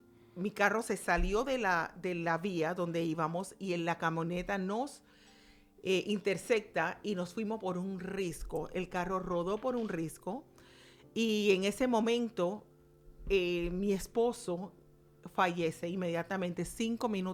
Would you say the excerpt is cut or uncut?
uncut